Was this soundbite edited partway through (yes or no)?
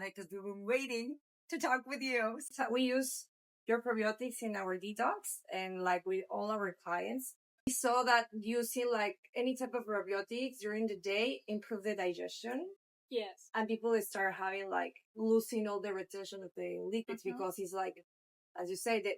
yes